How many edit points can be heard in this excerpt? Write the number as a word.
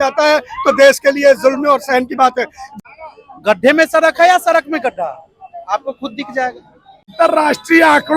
two